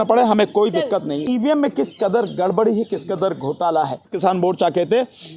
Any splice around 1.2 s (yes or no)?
yes